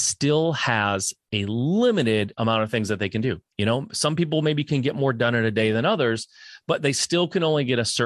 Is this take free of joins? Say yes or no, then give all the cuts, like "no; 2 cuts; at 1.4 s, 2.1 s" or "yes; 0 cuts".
no; 1 cut; at 3.5 s